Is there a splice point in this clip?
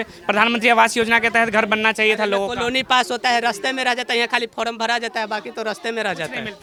no; 0 cuts

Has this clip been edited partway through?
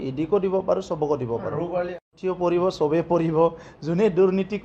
yes; 1 cut; at 1.9 s

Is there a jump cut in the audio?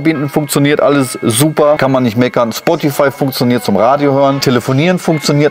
yes; 2 cuts; at 1.8 s, 4.4 s

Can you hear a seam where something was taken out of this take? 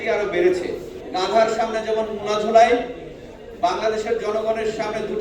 yes; 1 cut; at 0.9 s

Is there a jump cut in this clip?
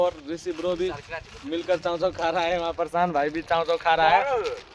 no; 0 cuts

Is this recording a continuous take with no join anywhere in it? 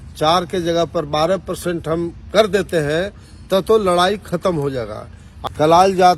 no; 1 cut; at 5.3 s

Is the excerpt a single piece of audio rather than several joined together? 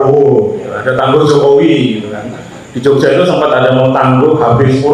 yes; 0 cuts

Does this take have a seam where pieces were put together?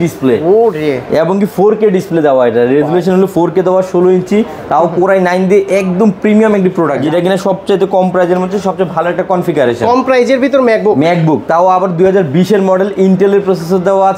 yes; 1 cut; at 7.0 s

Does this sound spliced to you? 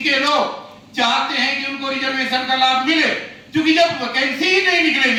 no; 0 cuts

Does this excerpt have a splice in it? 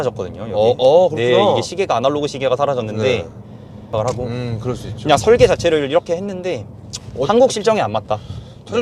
yes; 1 cut; at 3.9 s

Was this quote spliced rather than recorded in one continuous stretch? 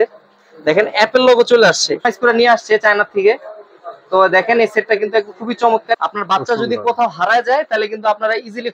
yes; 2 cuts; at 2.1 s, 6.0 s

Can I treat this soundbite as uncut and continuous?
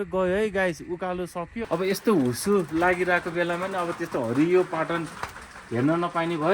no; 1 cut; at 1.5 s

